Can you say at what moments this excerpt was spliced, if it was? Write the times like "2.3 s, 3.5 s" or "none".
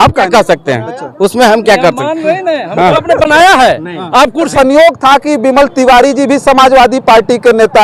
4.5 s